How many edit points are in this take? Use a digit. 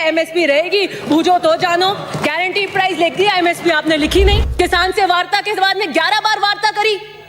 1